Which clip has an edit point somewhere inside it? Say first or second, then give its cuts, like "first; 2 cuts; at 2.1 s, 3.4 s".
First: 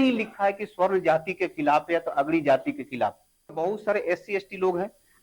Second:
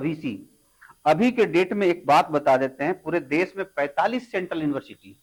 first; 1 cut; at 3.5 s